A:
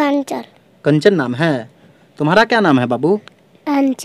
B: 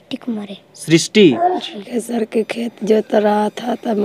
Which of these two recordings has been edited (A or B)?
B